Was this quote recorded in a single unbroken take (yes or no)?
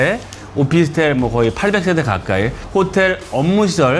no